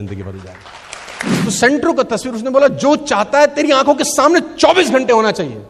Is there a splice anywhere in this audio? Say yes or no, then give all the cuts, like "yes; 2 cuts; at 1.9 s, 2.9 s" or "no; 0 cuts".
yes; 1 cut; at 1.4 s